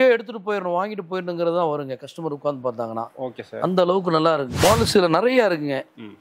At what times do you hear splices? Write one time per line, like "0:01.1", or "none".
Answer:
0:04.5